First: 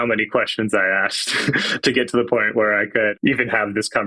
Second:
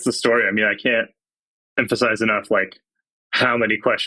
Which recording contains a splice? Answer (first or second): first